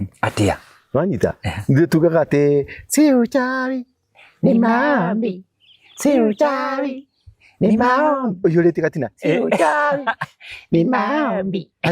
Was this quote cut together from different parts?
no; 0 cuts

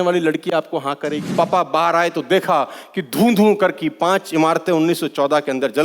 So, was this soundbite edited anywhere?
yes; 1 cut; at 1.3 s

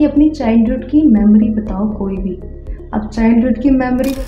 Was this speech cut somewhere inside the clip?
no; 0 cuts

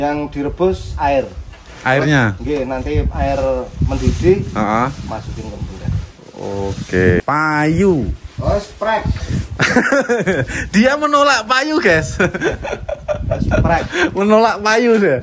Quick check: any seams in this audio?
yes; 1 cut; at 7.2 s

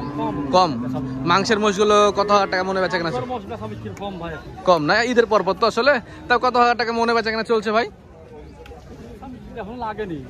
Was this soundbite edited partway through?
no; 0 cuts

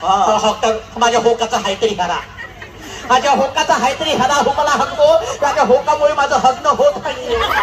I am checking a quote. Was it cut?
no; 0 cuts

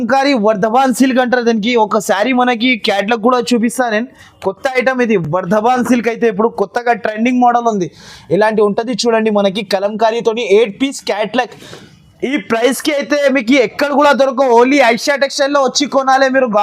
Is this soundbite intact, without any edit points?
yes; 0 cuts

